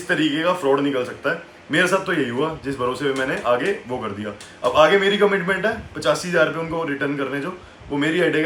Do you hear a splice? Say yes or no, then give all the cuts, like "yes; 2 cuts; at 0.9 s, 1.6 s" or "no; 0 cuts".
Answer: no; 0 cuts